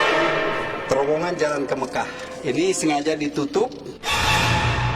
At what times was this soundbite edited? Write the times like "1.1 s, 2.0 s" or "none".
3.9 s